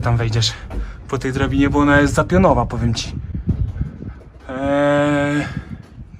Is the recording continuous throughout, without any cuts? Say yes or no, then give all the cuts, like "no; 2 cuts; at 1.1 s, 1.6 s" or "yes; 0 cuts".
yes; 0 cuts